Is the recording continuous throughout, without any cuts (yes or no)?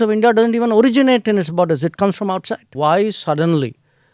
no